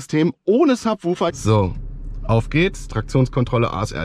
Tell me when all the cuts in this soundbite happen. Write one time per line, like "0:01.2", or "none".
0:01.3